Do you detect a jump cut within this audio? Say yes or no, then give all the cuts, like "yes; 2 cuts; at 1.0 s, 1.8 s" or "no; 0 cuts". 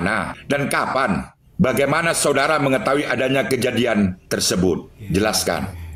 no; 0 cuts